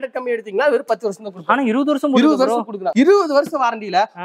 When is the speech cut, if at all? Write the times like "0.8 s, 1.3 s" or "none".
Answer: none